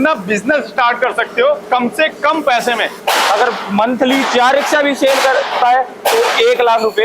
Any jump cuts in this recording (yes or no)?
yes